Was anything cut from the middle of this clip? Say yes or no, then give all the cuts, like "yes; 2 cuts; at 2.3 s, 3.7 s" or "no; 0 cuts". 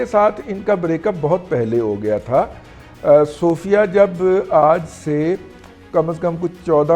no; 0 cuts